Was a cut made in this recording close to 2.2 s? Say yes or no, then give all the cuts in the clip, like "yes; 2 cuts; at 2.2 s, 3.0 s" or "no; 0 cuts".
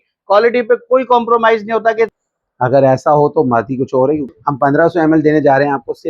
yes; 2 cuts; at 2.2 s, 4.3 s